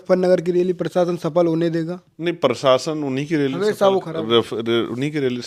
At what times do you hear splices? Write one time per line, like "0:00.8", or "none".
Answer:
none